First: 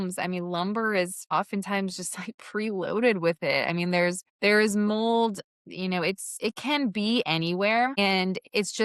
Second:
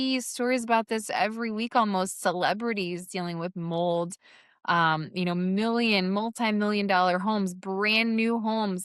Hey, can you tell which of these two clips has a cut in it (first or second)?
first